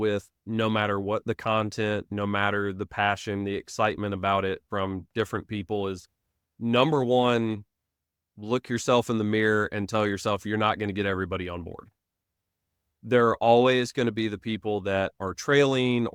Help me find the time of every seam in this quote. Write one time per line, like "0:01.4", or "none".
none